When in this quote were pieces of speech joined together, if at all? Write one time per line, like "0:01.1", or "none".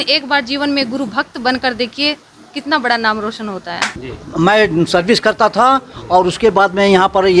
0:04.1